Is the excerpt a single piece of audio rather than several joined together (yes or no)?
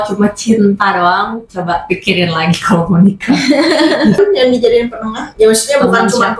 no